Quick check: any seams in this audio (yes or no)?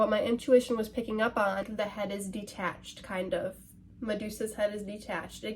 yes